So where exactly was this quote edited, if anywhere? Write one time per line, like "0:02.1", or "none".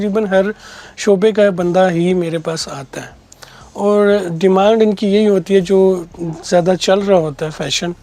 none